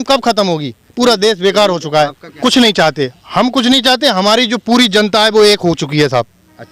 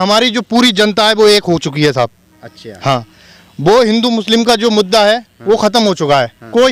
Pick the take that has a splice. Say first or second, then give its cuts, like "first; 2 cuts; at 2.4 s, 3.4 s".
first; 1 cut; at 2.3 s